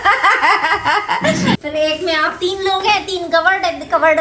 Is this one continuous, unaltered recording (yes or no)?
no